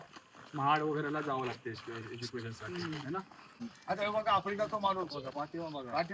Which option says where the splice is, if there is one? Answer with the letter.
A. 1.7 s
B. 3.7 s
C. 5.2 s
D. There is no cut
B